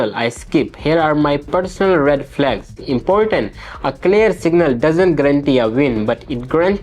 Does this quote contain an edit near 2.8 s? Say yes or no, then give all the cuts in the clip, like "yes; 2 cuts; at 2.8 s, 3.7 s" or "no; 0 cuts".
yes; 1 cut; at 2.8 s